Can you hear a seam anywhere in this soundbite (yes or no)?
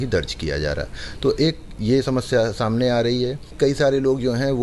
yes